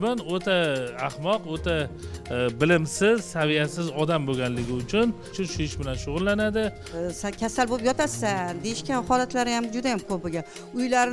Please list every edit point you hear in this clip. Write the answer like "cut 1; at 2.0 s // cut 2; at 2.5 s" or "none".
cut 1; at 6.9 s